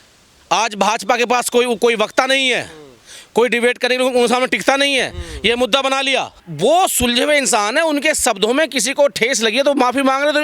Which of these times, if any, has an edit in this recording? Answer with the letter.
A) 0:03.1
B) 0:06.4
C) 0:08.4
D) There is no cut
B